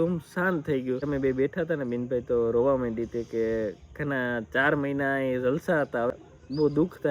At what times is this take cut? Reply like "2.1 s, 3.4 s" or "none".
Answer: 1.1 s, 6.1 s